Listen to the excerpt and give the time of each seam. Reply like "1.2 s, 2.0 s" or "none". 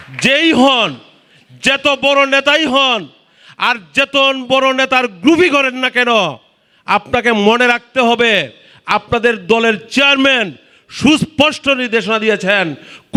none